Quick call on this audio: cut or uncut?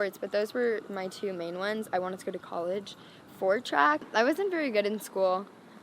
cut